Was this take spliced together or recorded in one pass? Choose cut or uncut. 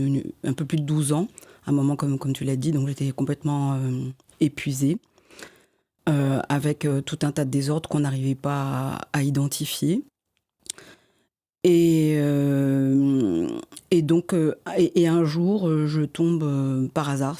uncut